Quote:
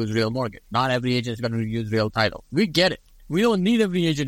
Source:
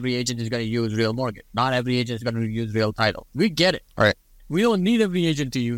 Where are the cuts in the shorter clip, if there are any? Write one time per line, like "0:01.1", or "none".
0:03.0